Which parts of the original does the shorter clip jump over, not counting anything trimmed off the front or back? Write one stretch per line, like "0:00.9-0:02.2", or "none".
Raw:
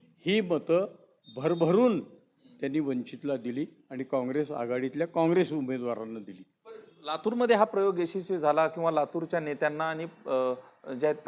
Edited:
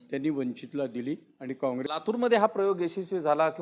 0:04.3-0:07.0